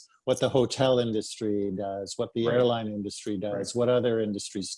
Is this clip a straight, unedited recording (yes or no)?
yes